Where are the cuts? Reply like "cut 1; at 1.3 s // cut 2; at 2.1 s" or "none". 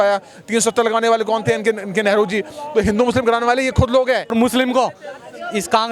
cut 1; at 4.3 s

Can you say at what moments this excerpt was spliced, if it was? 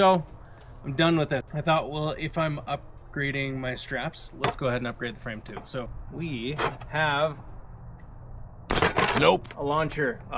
cut 1; at 1.4 s // cut 2; at 6.0 s

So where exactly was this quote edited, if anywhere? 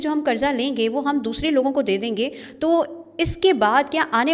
none

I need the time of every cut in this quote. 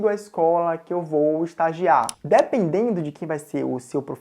cut 1; at 2.1 s

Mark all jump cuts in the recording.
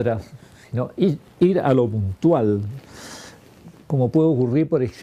cut 1; at 2.5 s

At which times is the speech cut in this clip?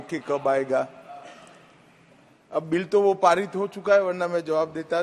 none

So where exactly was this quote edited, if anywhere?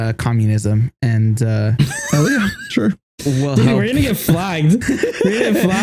none

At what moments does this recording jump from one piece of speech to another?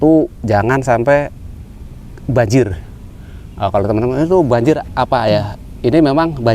none

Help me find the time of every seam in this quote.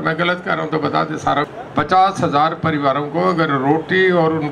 cut 1; at 1.6 s

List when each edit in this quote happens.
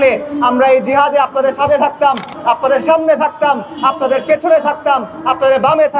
none

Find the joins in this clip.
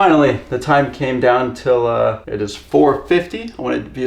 cut 1; at 2.3 s

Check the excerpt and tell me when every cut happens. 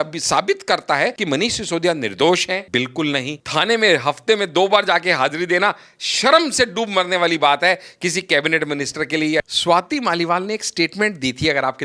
cut 1; at 1.2 s // cut 2; at 2.7 s // cut 3; at 3.4 s // cut 4; at 9.5 s

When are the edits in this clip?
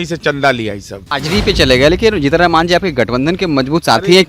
cut 1; at 1.1 s

